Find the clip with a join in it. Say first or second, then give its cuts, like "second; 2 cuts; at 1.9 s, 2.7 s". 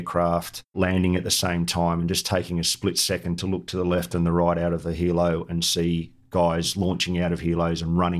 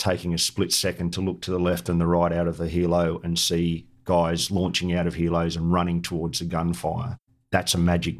second; 1 cut; at 7.2 s